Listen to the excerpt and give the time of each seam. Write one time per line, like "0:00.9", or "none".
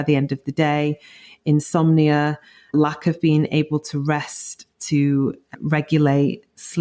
0:02.7
0:05.5

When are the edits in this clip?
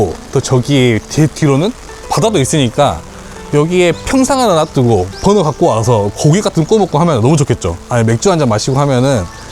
none

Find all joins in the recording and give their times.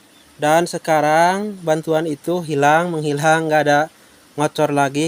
none

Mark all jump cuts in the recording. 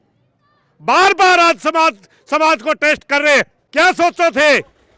0:03.6

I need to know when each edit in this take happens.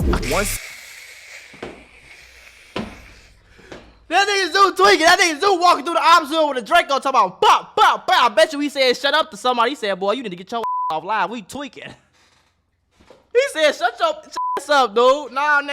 0:13.2

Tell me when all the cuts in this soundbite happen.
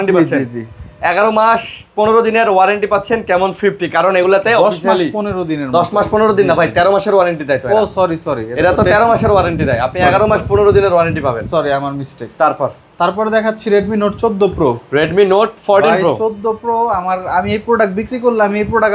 none

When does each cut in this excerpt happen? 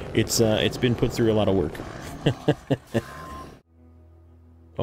0:03.5

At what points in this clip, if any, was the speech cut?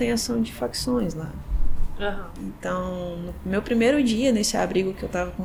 none

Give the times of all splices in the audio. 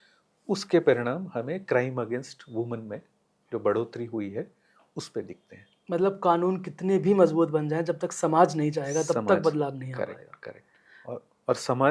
none

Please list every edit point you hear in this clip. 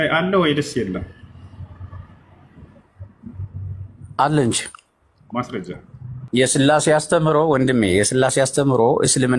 0:06.2

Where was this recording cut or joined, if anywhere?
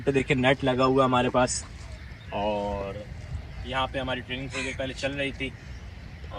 none

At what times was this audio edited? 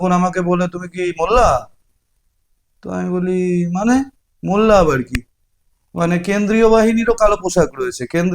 none

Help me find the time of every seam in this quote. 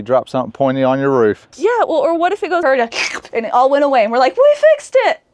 0:01.5
0:02.6

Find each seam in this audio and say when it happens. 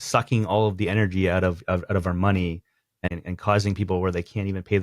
0:03.1

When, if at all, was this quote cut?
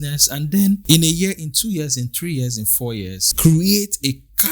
0:00.8
0:03.2

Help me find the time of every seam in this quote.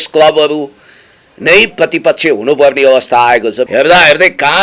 0:03.7

